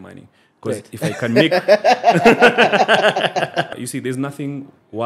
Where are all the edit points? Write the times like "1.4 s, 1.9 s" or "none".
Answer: 3.7 s